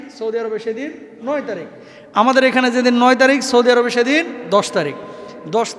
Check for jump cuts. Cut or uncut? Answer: uncut